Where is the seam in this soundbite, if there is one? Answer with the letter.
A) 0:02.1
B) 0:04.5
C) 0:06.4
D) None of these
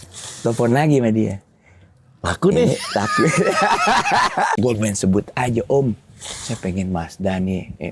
B